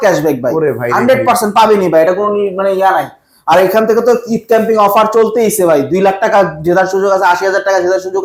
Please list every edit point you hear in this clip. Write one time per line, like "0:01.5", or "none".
none